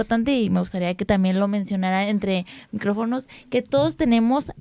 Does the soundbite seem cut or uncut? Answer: uncut